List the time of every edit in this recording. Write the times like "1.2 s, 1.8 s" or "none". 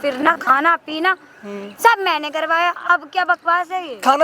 none